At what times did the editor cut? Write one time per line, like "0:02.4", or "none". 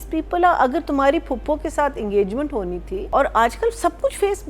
0:03.0

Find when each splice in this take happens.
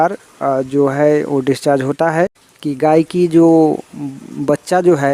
0:02.5

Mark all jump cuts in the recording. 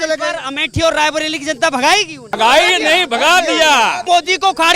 0:02.3
0:04.1

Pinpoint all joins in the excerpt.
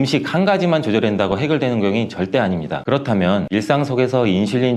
0:02.8

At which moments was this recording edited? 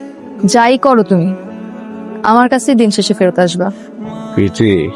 none

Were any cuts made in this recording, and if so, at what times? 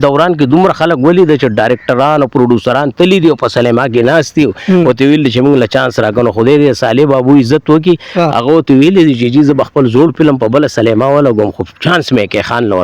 none

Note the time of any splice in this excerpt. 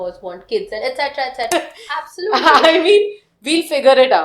0:01.5

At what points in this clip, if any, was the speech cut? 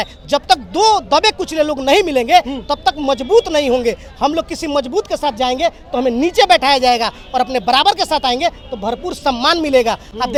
none

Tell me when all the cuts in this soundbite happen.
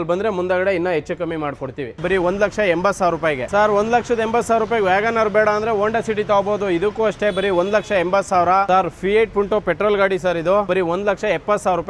0:02.0
0:03.5
0:08.7
0:10.7

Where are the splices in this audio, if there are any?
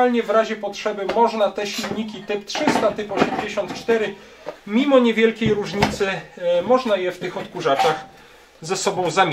none

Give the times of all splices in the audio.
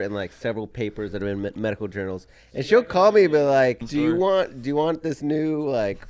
0:03.8

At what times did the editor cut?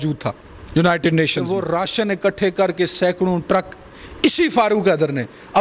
0:01.6

